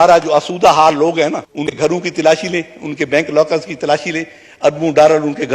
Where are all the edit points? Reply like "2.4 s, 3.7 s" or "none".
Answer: 1.8 s